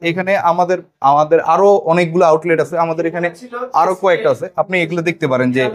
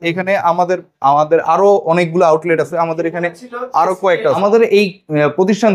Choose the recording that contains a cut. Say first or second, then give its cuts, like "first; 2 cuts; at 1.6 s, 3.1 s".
second; 1 cut; at 4.4 s